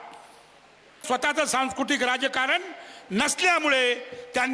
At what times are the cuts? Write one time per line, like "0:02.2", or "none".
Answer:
0:01.0